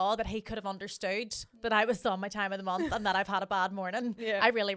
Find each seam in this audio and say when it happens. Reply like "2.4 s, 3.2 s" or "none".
none

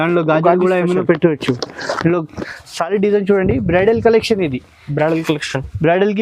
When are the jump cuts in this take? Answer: 2.4 s

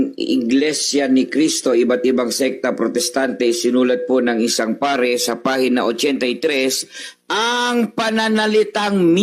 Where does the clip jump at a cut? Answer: none

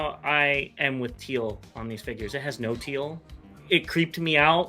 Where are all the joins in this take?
3.6 s

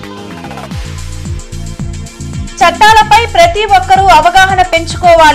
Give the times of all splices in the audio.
2.3 s

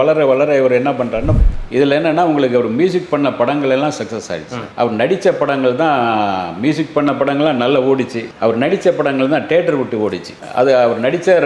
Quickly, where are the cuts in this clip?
1.3 s

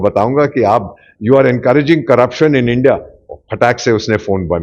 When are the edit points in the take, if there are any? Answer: none

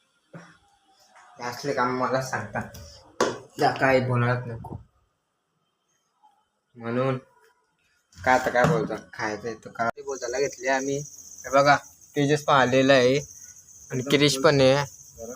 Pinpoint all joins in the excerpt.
9.9 s

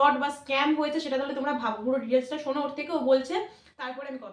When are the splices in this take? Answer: none

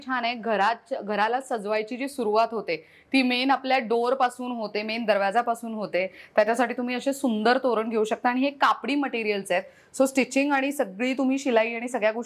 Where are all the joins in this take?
none

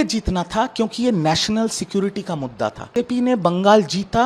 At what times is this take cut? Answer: 2.8 s

